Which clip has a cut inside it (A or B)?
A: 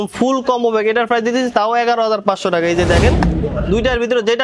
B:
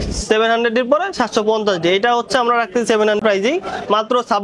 B